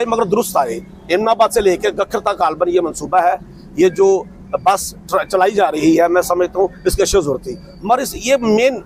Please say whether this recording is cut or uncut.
uncut